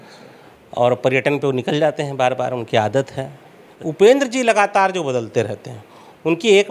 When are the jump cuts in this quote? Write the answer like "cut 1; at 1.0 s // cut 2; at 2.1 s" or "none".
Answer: cut 1; at 3.7 s

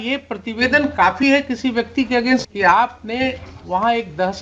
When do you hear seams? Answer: cut 1; at 2.5 s

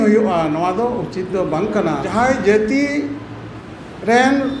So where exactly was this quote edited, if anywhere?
cut 1; at 2.1 s

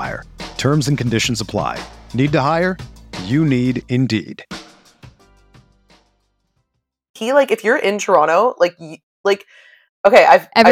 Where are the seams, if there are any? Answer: cut 1; at 7.2 s

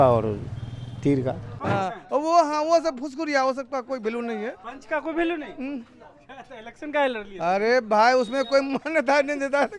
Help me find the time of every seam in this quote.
cut 1; at 1.5 s

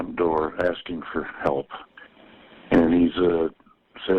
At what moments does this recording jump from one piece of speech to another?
cut 1; at 2.2 s

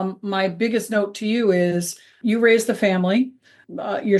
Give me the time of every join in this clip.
none

